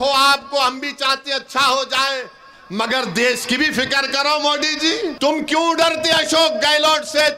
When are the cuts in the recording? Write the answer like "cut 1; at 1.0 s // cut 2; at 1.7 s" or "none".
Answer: cut 1; at 5.1 s